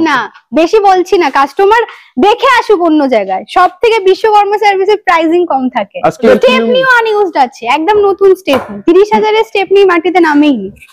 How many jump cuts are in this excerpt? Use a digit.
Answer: 1